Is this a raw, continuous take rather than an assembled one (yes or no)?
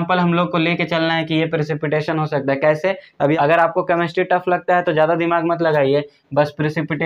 no